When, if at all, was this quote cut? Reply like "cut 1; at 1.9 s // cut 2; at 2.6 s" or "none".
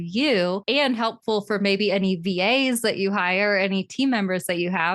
none